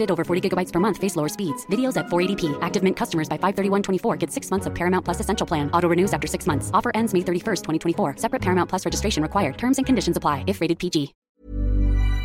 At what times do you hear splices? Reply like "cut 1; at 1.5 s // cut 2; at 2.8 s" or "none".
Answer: cut 1; at 11.2 s